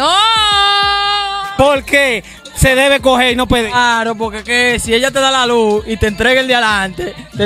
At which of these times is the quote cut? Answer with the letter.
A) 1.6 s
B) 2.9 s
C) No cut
A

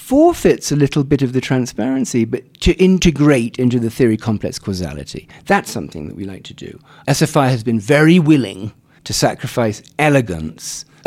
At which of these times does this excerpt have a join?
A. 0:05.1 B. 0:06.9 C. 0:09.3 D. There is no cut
B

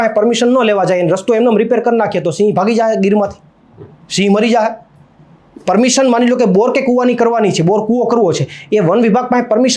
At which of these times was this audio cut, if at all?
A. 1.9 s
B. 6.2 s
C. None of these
C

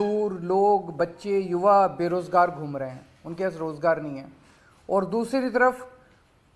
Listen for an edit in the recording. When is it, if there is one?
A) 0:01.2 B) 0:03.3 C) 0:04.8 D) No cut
D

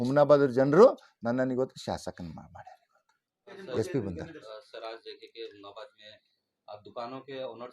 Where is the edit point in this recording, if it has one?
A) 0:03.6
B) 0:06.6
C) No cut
A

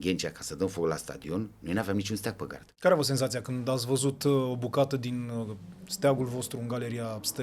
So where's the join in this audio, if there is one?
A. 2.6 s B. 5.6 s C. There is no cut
A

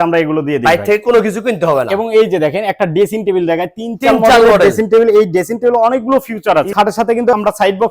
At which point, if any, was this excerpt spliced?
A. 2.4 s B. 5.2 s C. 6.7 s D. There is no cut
C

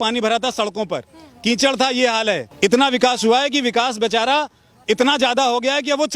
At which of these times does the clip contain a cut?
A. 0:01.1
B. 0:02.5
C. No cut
B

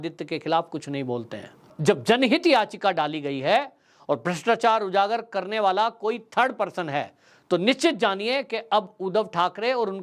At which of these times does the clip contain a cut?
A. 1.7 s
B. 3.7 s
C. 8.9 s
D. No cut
A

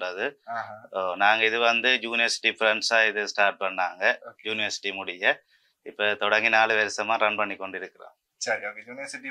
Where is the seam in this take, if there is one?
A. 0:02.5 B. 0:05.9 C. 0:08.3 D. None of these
D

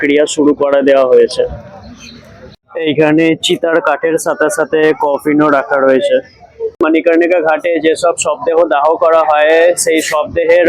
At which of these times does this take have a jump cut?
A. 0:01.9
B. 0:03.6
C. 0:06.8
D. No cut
C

